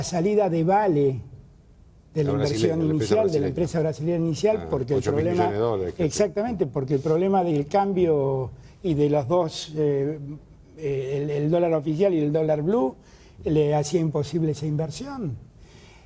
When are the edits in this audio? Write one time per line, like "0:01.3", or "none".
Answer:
none